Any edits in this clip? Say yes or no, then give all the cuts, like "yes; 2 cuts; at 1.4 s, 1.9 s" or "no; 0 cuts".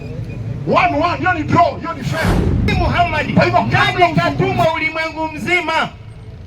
yes; 1 cut; at 4.1 s